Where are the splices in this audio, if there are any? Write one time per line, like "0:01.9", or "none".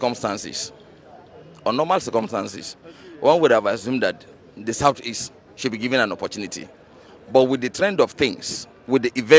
none